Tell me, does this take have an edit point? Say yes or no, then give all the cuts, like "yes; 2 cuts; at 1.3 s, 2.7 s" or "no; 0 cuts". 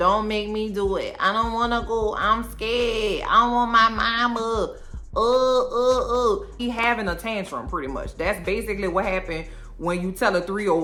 no; 0 cuts